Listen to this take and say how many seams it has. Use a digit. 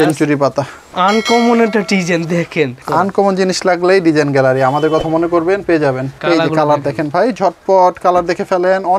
3